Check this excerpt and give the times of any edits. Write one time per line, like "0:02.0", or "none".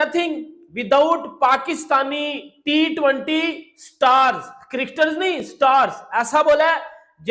none